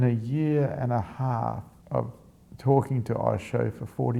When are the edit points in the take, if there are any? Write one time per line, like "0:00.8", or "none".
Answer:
0:01.7